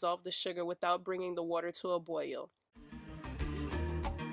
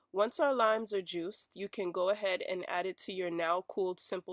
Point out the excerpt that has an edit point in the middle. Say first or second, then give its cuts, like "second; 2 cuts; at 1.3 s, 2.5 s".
first; 1 cut; at 3.0 s